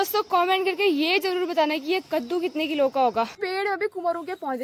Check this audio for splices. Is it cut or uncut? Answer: cut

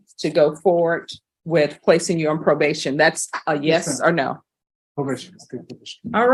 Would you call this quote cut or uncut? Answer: uncut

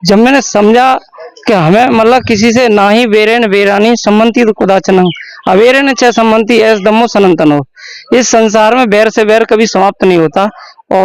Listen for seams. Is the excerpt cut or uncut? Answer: uncut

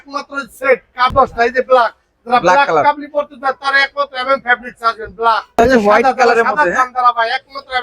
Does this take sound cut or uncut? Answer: cut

